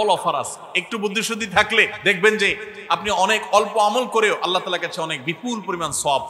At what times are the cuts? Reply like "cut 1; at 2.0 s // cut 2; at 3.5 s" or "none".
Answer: cut 1; at 1.9 s